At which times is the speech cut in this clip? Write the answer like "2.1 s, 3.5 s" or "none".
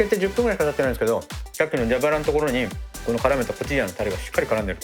1.4 s